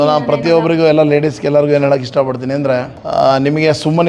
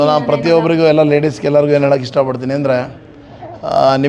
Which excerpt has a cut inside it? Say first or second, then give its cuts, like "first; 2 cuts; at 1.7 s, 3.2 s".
first; 1 cut; at 3.0 s